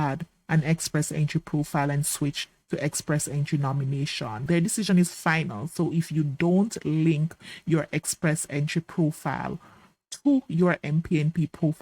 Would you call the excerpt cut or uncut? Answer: cut